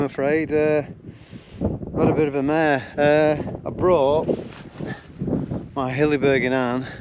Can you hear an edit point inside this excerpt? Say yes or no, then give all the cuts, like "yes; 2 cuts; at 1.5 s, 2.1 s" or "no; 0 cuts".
no; 0 cuts